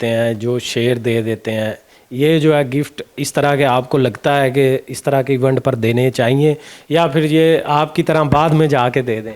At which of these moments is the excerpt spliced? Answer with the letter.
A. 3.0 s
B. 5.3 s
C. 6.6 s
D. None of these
D